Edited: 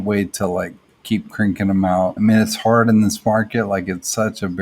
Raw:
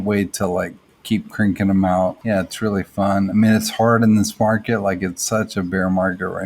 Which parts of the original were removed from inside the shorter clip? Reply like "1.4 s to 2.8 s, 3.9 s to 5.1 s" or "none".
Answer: 2.2 s to 3.3 s